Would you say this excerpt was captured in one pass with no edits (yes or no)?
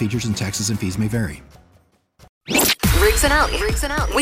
no